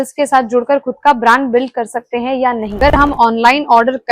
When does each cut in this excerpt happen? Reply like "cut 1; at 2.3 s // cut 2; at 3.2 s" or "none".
cut 1; at 2.8 s